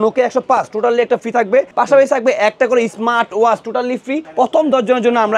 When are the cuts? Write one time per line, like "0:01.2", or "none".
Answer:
0:01.7
0:04.2

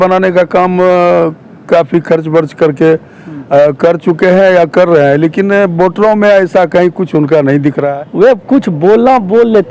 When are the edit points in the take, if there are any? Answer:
0:07.8

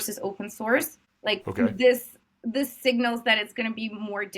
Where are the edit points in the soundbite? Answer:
0:01.0

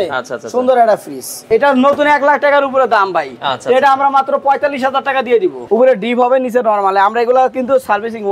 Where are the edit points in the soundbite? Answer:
0:01.4
0:05.6

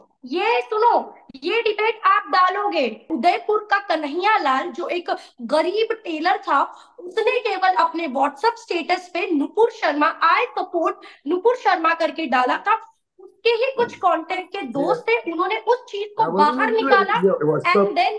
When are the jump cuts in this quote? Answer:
0:03.1

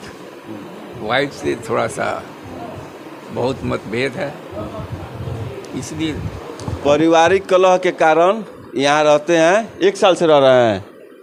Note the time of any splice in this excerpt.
none

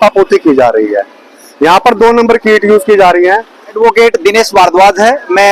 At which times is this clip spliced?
0:03.8

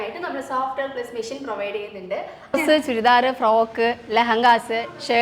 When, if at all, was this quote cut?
0:02.5

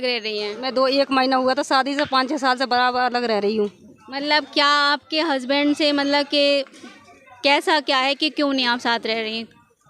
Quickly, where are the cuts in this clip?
none

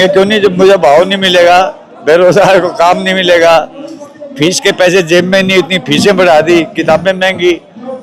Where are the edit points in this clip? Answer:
none

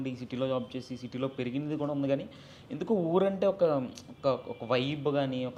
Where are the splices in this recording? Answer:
none

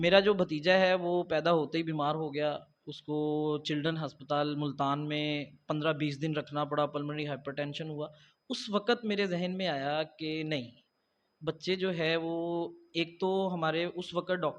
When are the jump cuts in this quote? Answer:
none

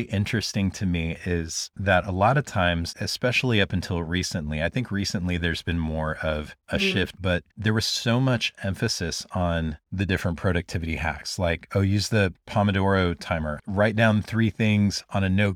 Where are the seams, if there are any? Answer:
0:02.9
0:07.2

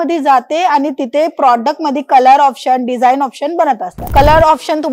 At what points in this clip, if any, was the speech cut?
0:03.9

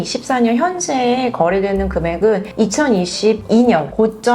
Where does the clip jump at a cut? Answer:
none

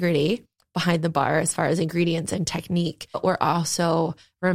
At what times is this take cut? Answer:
0:03.2

